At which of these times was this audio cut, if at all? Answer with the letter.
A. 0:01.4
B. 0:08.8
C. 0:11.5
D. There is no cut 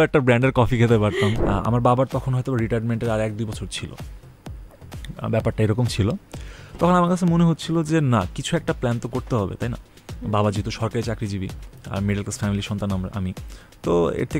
A